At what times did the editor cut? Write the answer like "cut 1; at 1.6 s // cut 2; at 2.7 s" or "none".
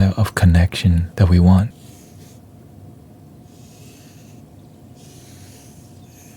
cut 1; at 1.1 s // cut 2; at 1.7 s